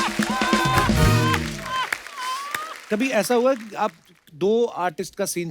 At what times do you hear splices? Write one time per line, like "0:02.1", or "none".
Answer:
0:02.7